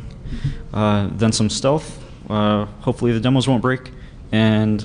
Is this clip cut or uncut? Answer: uncut